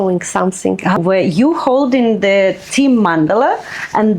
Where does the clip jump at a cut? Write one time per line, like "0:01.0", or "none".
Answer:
0:01.0